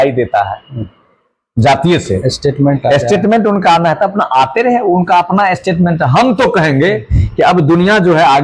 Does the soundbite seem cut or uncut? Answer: uncut